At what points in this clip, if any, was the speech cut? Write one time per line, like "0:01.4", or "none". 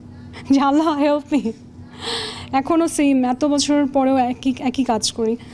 none